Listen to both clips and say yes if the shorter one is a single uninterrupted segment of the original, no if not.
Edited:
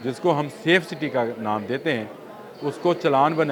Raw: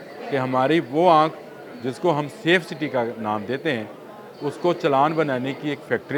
yes